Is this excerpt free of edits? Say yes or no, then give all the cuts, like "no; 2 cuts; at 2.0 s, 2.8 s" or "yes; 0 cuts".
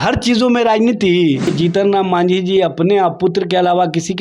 no; 1 cut; at 1.5 s